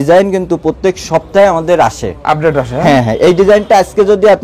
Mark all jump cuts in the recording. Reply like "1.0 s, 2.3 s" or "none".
none